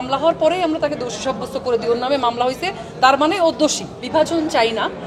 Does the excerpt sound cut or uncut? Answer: cut